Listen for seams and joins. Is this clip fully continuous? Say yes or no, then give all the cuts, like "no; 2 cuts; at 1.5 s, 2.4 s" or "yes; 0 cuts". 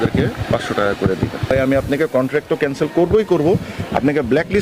no; 1 cut; at 1.5 s